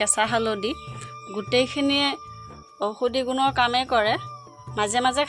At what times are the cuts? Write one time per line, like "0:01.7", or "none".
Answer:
none